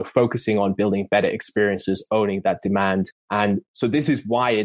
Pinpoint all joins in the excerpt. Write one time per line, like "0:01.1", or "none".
none